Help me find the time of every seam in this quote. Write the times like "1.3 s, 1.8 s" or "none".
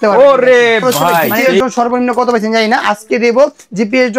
1.6 s

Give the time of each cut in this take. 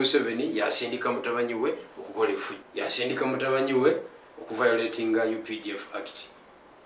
2.5 s

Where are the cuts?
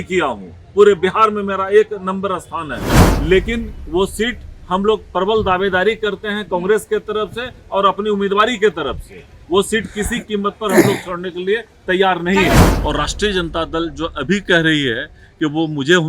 3.0 s, 12.6 s

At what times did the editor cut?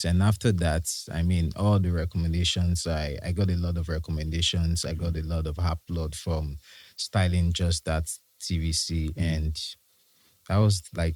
none

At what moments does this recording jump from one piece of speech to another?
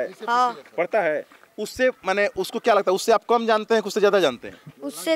none

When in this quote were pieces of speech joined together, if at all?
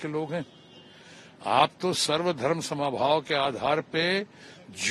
none

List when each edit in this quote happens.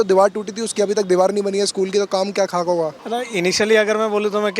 3.0 s

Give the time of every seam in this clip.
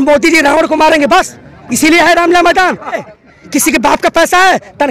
3.0 s

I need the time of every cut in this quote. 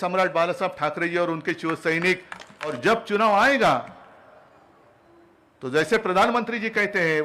2.6 s

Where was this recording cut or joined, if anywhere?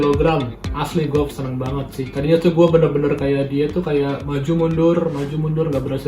2.1 s

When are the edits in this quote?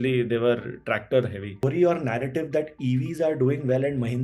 1.6 s

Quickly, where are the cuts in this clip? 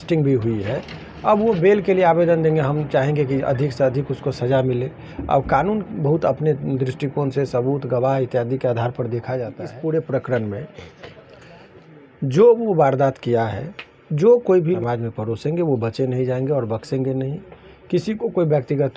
9.6 s, 14.8 s

